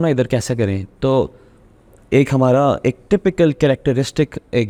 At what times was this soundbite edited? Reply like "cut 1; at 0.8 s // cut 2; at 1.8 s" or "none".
none